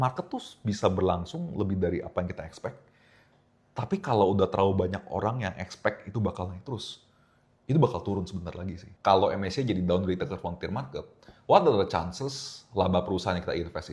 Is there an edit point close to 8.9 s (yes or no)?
yes